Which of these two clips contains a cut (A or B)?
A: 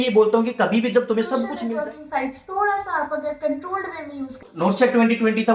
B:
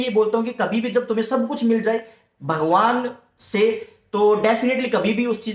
A